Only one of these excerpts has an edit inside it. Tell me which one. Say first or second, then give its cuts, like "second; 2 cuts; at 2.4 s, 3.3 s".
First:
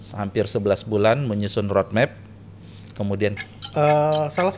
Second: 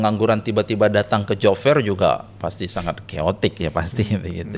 first; 1 cut; at 3.3 s